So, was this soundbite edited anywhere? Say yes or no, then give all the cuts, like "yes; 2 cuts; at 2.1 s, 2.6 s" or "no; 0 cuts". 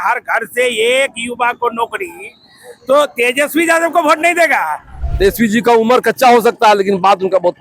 yes; 1 cut; at 5.0 s